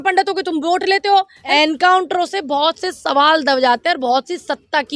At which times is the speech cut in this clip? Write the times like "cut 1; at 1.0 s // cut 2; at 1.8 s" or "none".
cut 1; at 1.5 s